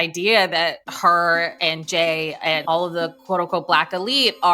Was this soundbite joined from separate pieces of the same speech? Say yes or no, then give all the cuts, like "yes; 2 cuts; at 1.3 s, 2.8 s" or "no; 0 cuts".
no; 0 cuts